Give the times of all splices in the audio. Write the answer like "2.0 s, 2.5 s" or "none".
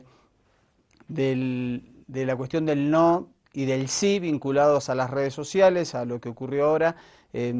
2.5 s